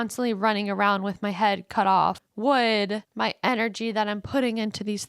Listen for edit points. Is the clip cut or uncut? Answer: cut